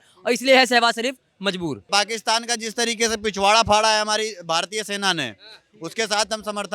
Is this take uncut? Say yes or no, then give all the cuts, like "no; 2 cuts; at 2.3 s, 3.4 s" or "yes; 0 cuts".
no; 1 cut; at 1.9 s